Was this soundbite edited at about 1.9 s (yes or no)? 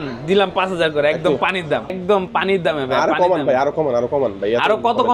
yes